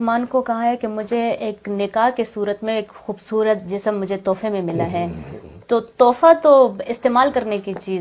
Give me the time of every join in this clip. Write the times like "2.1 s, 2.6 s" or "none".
none